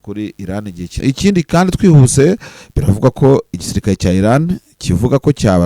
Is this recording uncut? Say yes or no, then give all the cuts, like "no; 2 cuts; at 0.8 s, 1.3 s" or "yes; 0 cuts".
no; 1 cut; at 0.9 s